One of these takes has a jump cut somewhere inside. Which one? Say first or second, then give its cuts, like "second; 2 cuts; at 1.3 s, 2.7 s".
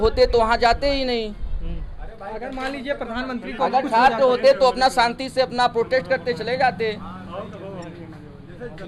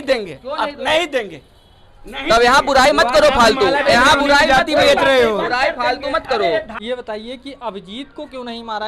second; 1 cut; at 6.7 s